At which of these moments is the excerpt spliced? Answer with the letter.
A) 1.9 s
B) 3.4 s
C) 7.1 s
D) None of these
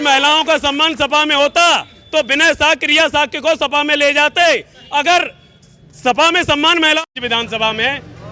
C